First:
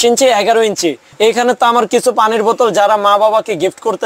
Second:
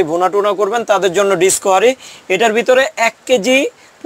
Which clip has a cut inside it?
first; 1 cut; at 1.1 s

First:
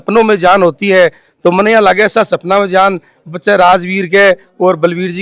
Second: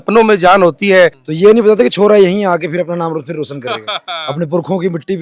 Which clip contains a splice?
second; 1 cut; at 1.2 s

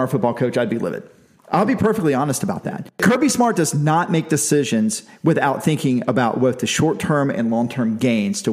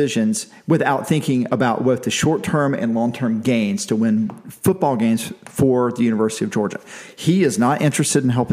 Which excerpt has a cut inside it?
first; 1 cut; at 2.9 s

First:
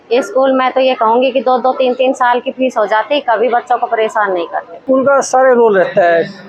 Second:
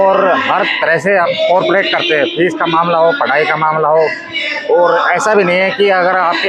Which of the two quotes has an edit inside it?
first; 1 cut; at 4.8 s

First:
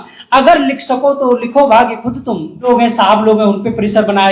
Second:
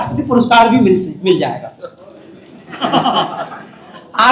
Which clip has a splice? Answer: first; 1 cut; at 2.7 s

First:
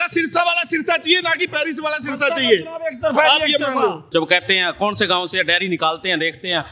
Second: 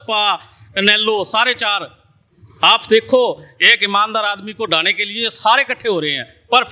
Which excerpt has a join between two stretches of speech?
first; 1 cut; at 4.0 s

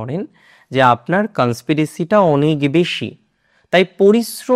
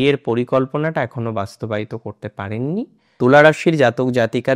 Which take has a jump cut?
second; 1 cut; at 3.0 s

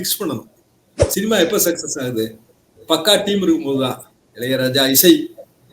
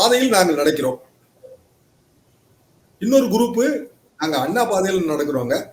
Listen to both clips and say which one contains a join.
first; 1 cut; at 1.0 s

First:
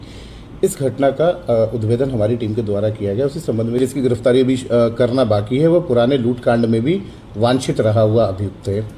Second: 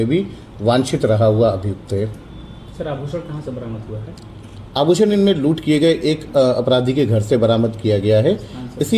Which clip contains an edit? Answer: first; 1 cut; at 3.8 s

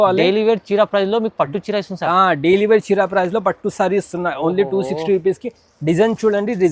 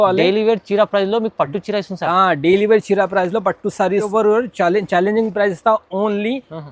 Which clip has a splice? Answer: second; 1 cut; at 4.1 s

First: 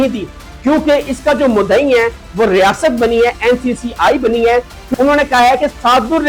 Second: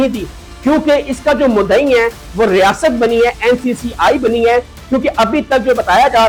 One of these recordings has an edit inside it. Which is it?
first; 1 cut; at 4.8 s

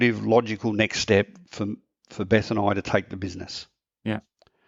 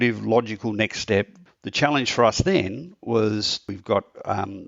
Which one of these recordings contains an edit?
second; 2 cuts; at 1.4 s, 3.7 s

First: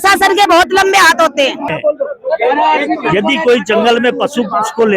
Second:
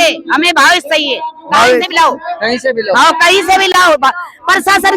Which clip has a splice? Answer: first; 1 cut; at 1.7 s

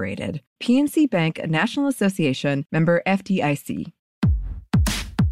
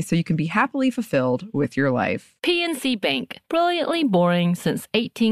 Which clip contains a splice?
first; 1 cut; at 4.4 s

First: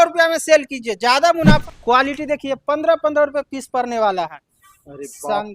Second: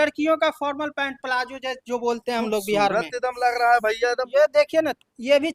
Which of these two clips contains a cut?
first; 1 cut; at 1.6 s

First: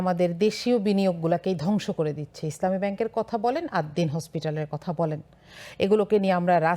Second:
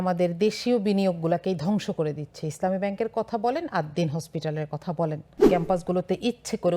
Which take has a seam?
second; 1 cut; at 5.4 s

